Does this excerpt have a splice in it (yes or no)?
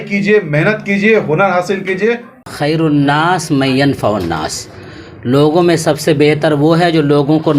yes